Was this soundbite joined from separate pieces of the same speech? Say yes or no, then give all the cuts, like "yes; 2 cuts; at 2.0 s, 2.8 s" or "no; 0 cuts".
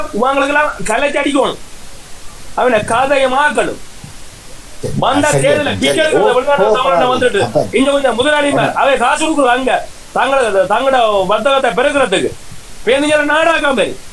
no; 0 cuts